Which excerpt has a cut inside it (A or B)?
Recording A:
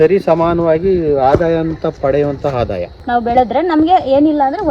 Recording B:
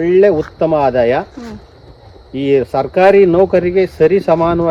A